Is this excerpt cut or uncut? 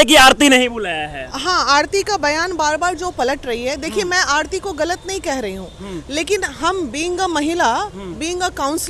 uncut